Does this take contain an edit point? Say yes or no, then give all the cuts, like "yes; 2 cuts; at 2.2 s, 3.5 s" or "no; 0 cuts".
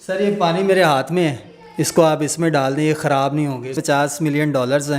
yes; 1 cut; at 3.8 s